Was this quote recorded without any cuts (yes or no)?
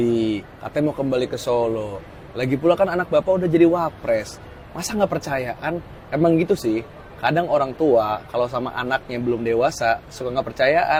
yes